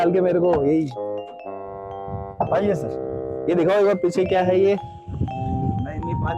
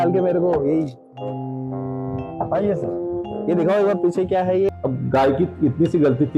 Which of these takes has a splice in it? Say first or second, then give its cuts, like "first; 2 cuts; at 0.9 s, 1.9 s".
second; 1 cut; at 4.7 s